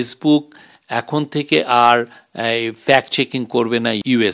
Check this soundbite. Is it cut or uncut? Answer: uncut